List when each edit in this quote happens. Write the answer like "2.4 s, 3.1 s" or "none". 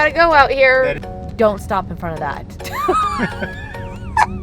1.1 s

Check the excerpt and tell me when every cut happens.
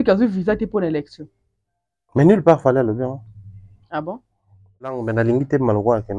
5.1 s

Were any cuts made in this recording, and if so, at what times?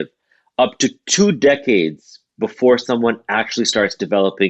none

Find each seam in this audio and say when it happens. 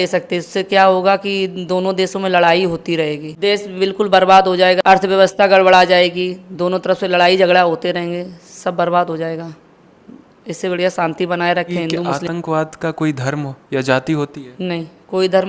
3.3 s, 4.8 s, 12.1 s

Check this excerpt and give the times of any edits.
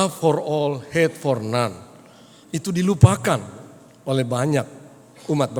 none

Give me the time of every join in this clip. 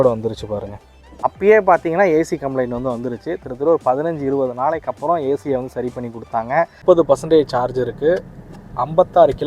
1.0 s, 6.7 s

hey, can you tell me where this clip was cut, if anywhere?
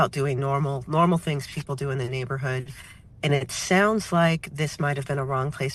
none

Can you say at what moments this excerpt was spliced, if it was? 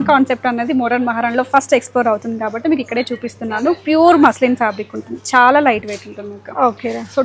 none

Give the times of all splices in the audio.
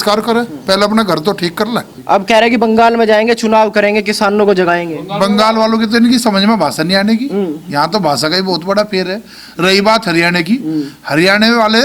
1.9 s

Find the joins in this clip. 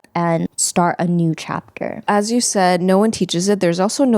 2.0 s

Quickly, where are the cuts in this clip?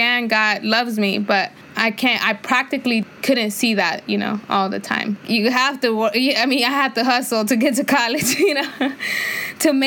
1.6 s, 3.0 s, 5.2 s

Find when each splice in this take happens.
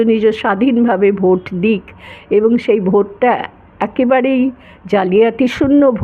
none

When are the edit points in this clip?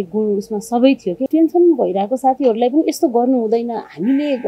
1.3 s

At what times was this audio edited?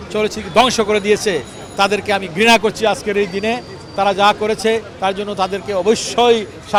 none

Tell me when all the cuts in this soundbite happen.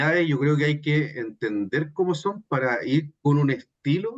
none

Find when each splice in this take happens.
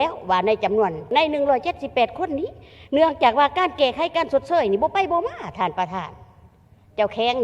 1.1 s

